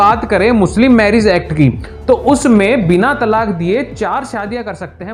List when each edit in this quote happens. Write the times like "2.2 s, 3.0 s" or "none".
none